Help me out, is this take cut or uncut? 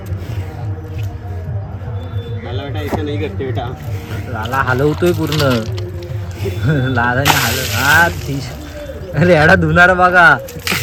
uncut